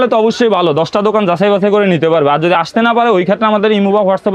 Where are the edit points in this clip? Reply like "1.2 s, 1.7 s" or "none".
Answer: none